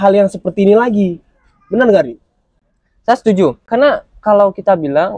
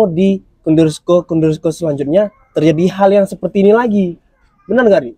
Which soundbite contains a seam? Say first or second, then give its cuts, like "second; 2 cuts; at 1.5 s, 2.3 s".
first; 1 cut; at 3.6 s